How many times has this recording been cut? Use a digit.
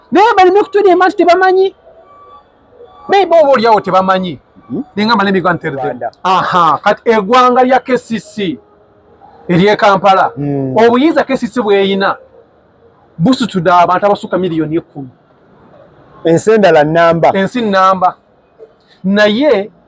1